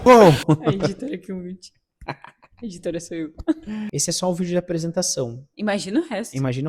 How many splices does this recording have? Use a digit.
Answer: 1